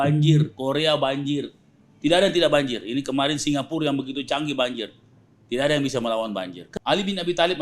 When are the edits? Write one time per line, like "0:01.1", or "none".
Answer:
0:06.6